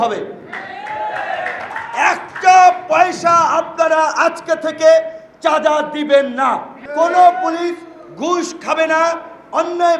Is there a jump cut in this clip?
yes; 1 cut; at 6.8 s

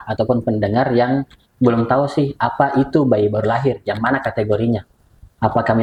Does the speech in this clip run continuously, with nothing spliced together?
yes; 0 cuts

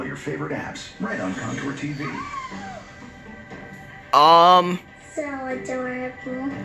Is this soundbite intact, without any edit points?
yes; 0 cuts

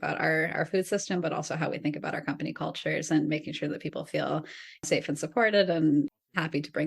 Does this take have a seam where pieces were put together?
yes; 2 cuts; at 4.8 s, 6.1 s

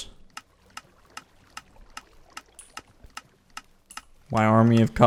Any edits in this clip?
no; 0 cuts

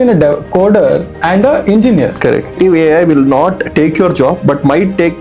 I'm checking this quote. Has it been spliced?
yes; 1 cut; at 2.5 s

